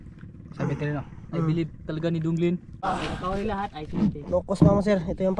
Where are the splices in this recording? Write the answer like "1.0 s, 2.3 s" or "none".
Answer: 2.7 s